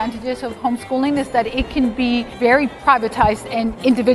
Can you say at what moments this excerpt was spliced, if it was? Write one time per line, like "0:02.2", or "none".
0:02.5